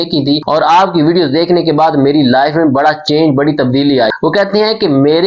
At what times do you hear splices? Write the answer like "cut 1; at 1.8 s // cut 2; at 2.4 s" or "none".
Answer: cut 1; at 4.1 s